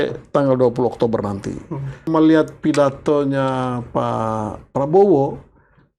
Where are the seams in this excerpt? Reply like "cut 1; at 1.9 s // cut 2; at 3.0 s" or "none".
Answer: cut 1; at 2.1 s